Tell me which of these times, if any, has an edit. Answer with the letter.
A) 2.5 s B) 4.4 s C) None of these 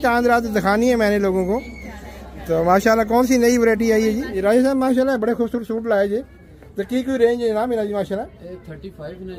B